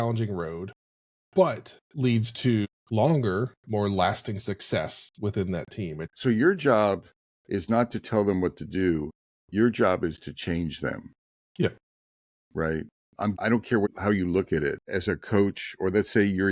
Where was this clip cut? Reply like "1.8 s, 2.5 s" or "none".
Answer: 2.7 s, 6.1 s, 13.4 s, 14.9 s